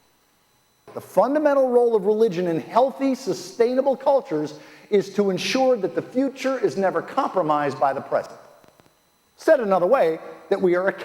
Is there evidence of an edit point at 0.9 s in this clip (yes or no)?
yes